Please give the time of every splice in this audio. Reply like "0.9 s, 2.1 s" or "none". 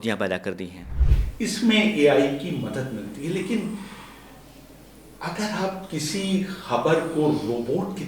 1.1 s